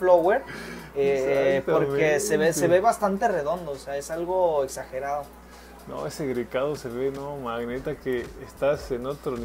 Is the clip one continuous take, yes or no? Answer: yes